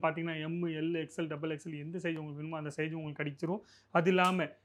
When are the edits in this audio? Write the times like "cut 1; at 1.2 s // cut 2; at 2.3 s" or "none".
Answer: none

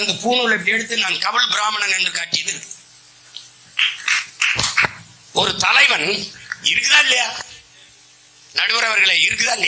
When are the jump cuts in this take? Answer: none

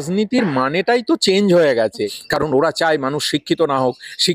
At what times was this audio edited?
cut 1; at 2.0 s

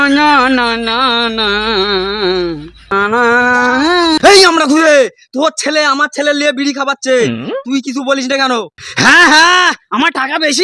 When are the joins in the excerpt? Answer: none

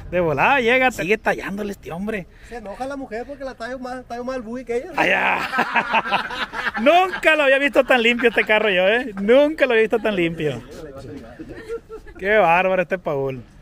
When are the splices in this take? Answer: cut 1; at 1.0 s

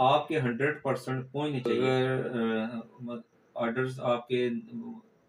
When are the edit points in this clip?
cut 1; at 1.7 s

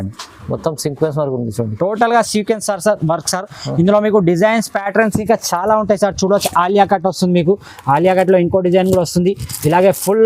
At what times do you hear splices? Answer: none

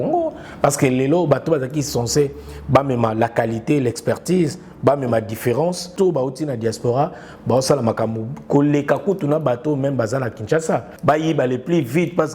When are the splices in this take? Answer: cut 1; at 5.9 s // cut 2; at 10.9 s

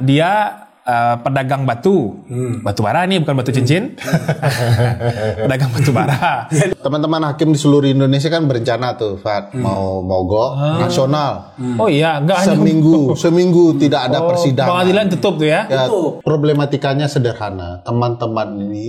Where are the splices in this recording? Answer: cut 1; at 6.7 s // cut 2; at 16.2 s

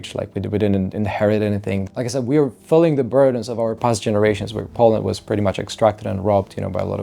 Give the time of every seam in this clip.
cut 1; at 1.8 s

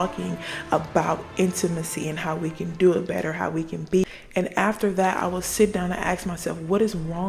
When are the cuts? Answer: cut 1; at 4.0 s

